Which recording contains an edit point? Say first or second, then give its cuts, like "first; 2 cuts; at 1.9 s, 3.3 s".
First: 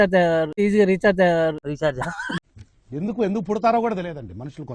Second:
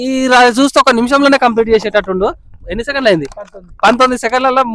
first; 1 cut; at 2.4 s